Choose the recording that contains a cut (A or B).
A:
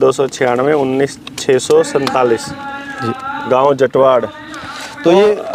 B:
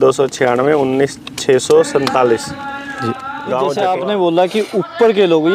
B